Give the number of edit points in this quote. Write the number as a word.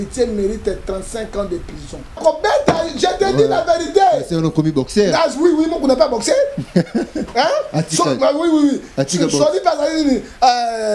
one